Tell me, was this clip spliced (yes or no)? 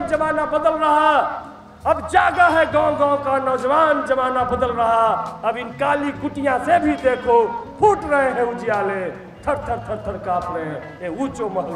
no